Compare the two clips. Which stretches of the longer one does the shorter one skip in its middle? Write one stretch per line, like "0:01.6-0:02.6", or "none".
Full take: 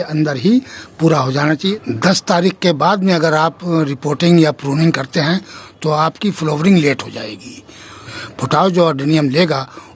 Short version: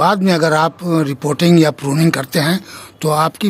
none